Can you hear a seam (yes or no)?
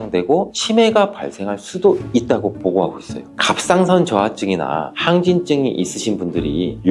no